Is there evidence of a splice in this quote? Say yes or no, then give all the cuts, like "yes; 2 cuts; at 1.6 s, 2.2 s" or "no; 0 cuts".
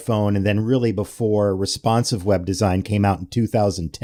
no; 0 cuts